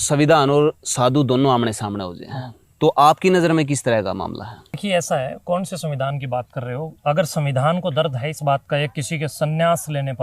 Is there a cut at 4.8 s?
yes; 1 cut; at 4.8 s

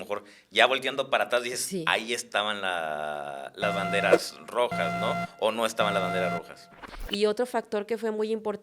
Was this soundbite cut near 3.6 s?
no; 1 cut; at 6.7 s

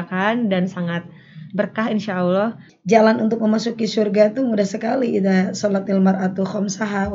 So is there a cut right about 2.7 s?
yes; 1 cut; at 2.7 s

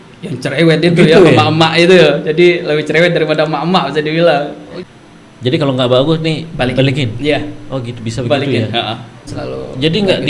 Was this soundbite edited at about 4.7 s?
yes; 2 cuts; at 4.7 s, 9.3 s

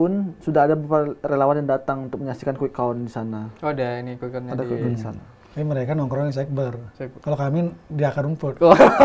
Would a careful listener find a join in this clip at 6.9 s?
no; 0 cuts

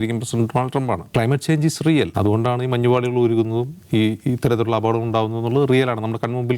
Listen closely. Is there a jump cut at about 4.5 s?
no; 2 cuts; at 1.1 s, 2.1 s

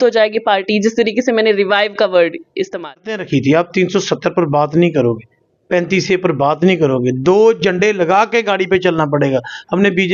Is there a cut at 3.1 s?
yes; 1 cut; at 3.1 s

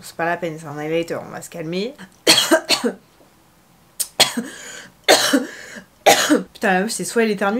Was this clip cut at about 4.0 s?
no; 2 cuts; at 2.0 s, 6.5 s

